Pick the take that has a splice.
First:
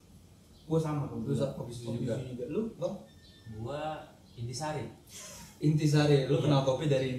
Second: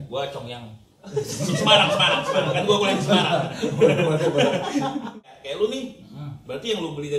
second; 1 cut; at 5.1 s

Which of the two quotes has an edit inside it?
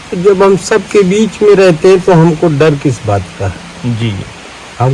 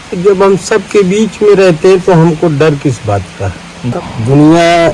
second; 1 cut; at 4.0 s

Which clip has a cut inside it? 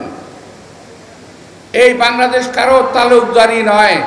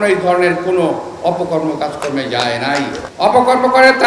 second; 1 cut; at 3.0 s

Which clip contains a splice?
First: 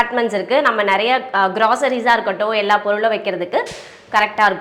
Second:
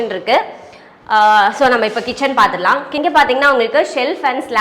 second; 1 cut; at 2.9 s

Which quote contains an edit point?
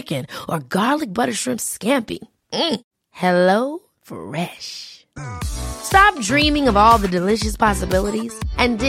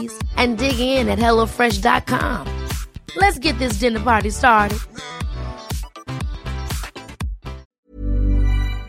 second; 1 cut; at 7.7 s

